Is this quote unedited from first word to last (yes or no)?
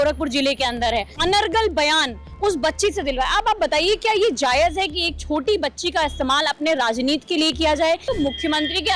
no